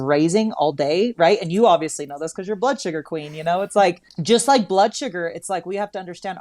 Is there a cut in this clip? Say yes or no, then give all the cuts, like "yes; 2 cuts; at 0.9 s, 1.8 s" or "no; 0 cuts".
yes; 1 cut; at 4.1 s